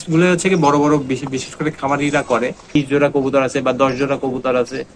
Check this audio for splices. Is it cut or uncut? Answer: cut